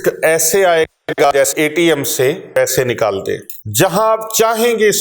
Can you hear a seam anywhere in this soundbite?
yes; 2 cuts; at 2.6 s, 3.6 s

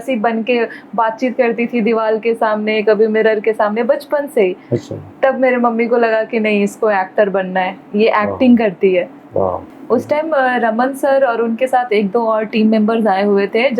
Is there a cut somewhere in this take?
yes; 1 cut; at 9.7 s

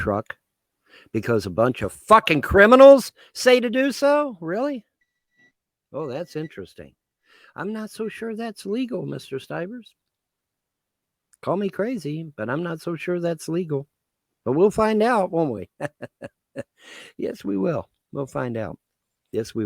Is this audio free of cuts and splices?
yes; 0 cuts

